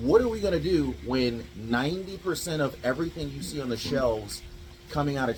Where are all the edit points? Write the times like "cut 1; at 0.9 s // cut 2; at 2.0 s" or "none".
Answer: none